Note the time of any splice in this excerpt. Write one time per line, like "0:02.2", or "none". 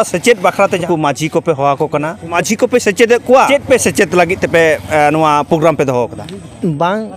0:00.8
0:02.4
0:03.5